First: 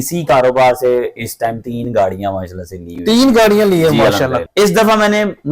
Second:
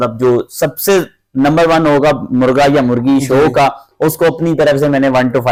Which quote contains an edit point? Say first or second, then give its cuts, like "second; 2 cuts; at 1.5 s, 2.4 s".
first; 1 cut; at 4.4 s